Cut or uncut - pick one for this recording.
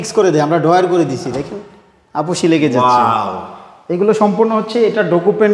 uncut